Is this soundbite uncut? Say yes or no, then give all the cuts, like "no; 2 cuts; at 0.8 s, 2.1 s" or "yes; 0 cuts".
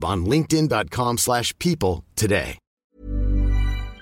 no; 1 cut; at 2.9 s